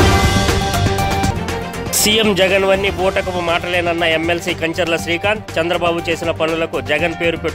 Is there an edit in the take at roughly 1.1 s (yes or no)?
yes